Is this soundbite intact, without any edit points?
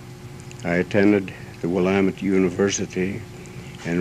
no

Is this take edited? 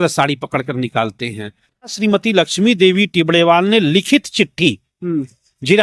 yes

